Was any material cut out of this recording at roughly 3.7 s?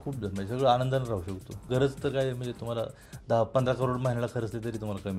no; 1 cut; at 1.5 s

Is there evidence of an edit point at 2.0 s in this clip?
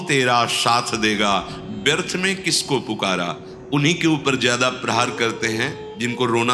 no; 1 cut; at 3.7 s

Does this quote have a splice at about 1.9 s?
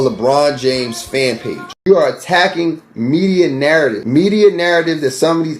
yes; 1 cut; at 1.9 s

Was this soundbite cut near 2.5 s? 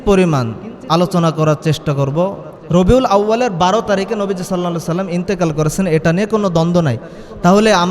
yes; 1 cut; at 2.5 s

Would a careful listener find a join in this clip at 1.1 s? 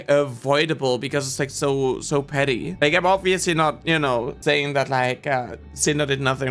no; 2 cuts; at 2.7 s, 4.3 s

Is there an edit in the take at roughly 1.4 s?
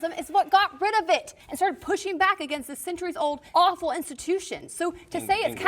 yes; 2 cuts; at 1.4 s, 3.4 s

